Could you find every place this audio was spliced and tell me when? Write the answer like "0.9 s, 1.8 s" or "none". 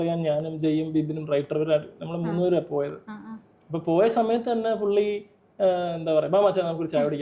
none